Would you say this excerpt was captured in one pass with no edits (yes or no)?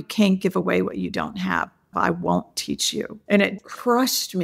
no